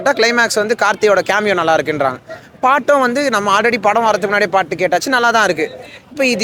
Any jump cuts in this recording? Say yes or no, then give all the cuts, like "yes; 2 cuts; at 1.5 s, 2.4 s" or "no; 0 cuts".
no; 0 cuts